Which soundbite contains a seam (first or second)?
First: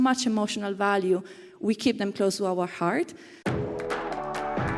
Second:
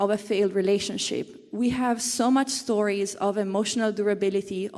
first